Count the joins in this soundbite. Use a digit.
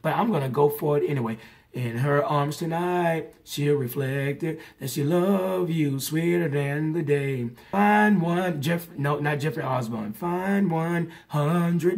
1